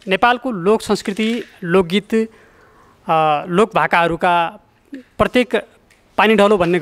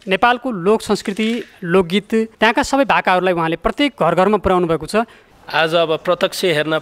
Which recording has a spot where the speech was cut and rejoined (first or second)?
second